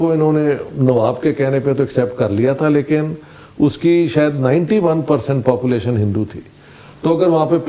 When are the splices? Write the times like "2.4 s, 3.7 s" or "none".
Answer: none